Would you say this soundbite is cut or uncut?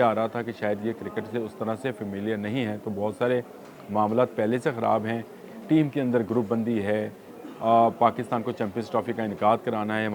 uncut